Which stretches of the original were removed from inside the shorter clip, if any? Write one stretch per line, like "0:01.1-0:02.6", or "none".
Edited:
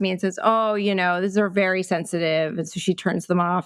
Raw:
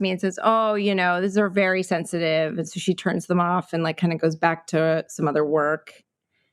none